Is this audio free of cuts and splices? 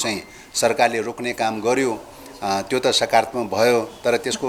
yes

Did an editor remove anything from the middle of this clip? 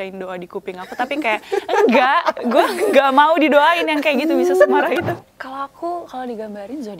yes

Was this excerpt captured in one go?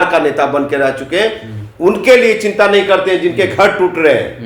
yes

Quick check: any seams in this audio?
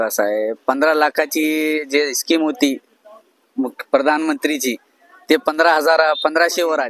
no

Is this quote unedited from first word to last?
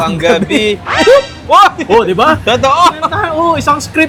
yes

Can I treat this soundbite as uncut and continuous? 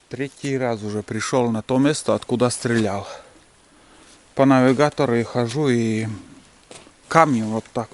yes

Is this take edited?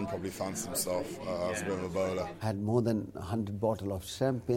yes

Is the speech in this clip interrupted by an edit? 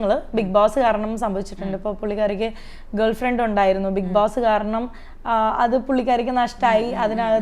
no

